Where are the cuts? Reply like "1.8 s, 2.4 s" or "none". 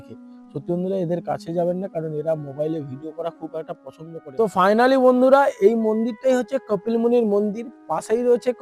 3.9 s